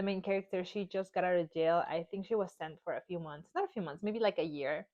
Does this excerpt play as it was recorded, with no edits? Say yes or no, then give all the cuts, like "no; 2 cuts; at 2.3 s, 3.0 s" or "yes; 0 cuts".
yes; 0 cuts